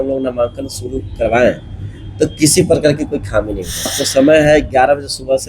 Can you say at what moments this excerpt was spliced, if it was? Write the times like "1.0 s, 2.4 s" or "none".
3.9 s